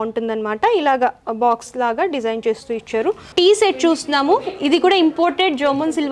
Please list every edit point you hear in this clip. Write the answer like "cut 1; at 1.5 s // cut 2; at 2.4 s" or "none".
cut 1; at 3.2 s